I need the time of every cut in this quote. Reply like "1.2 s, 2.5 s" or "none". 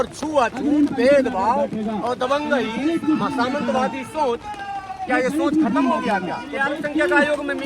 6.6 s

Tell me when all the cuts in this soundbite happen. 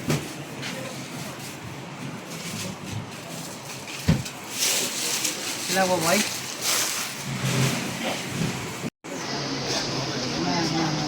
9.0 s

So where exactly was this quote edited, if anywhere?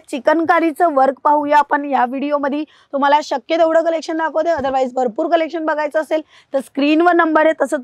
none

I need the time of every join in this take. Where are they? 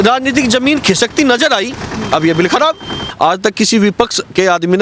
3.0 s

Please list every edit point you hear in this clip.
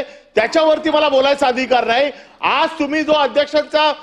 none

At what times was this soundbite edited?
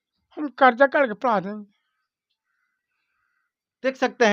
none

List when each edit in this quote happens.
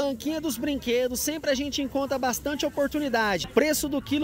none

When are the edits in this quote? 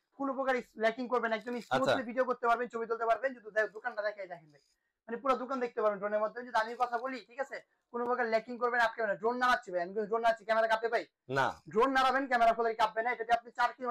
none

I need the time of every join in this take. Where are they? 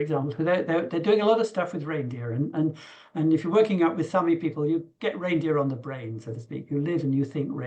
none

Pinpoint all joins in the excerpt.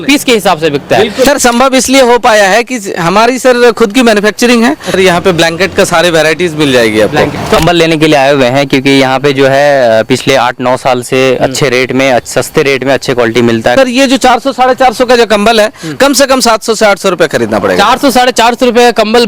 1.2 s, 4.9 s, 7.6 s, 13.7 s

